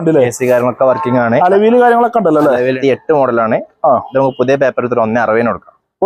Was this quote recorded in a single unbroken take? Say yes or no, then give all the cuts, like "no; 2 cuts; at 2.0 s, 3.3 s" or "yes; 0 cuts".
no; 1 cut; at 2.8 s